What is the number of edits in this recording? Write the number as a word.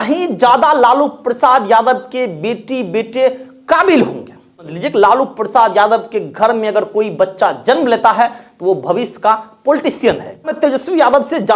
two